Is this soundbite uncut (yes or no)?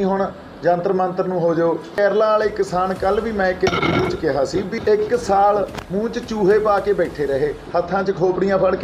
no